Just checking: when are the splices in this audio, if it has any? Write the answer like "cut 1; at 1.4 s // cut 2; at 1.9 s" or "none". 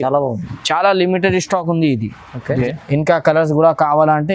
cut 1; at 2.6 s